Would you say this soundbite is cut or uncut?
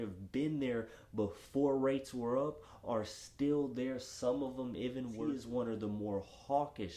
cut